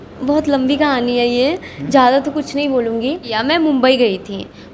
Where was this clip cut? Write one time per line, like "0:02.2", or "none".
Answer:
0:03.3